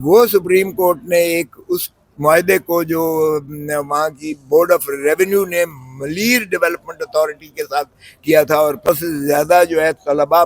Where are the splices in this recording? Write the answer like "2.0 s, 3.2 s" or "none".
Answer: 8.9 s

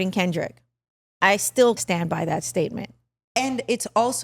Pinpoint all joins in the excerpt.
1.8 s

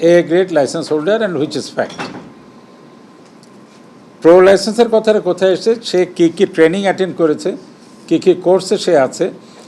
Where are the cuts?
none

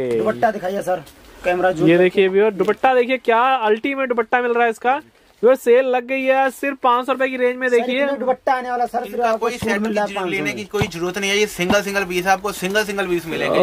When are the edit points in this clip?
none

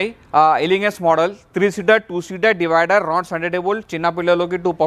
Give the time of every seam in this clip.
none

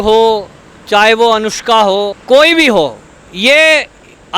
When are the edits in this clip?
2.2 s

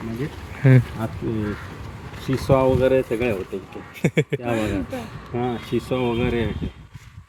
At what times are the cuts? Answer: none

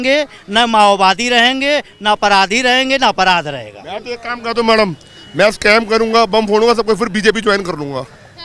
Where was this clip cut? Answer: none

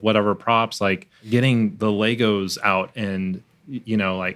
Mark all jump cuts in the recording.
1.2 s

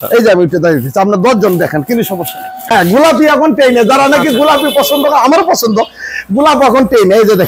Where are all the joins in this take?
2.5 s

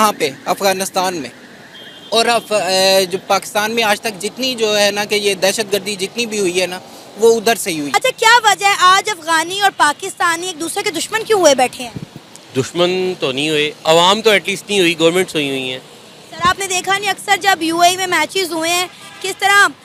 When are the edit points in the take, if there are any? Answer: none

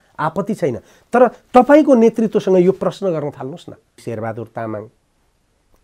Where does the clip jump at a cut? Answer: 4.0 s

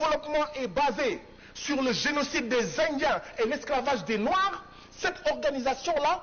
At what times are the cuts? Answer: none

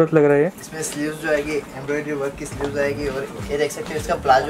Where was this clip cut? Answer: none

